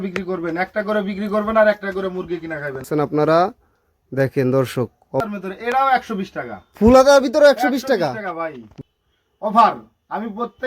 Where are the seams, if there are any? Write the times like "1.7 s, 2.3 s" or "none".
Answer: 2.8 s, 5.2 s, 8.6 s